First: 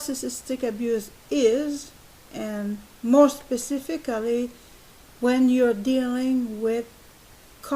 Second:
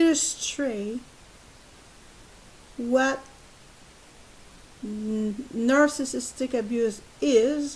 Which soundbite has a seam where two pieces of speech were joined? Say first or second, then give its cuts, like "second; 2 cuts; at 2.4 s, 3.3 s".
first; 1 cut; at 3.5 s